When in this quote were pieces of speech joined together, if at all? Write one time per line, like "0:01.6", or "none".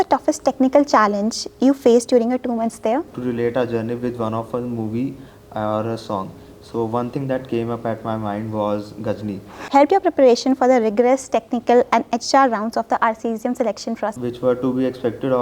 0:03.1
0:09.5
0:14.2